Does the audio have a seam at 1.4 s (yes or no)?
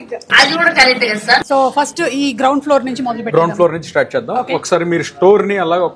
no